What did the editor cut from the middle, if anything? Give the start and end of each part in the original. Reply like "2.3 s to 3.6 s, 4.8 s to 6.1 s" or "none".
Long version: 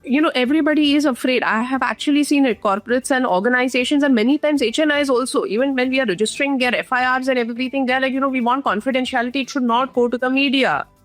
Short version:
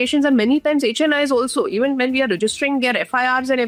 none